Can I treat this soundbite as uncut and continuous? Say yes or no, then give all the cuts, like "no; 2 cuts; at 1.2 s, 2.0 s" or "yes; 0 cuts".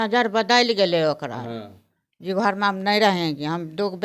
yes; 0 cuts